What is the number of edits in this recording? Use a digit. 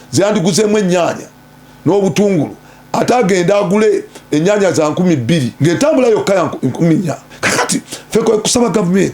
2